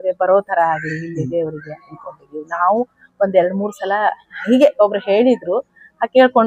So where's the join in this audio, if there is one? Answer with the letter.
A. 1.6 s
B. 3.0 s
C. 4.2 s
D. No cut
D